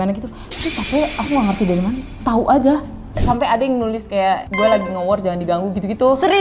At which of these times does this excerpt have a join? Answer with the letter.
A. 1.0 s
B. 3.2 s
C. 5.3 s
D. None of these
B